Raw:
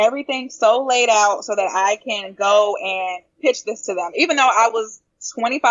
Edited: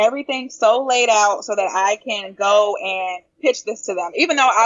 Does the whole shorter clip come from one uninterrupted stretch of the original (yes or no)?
yes